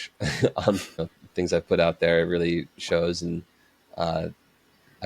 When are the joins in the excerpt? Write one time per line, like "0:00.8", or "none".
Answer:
0:01.1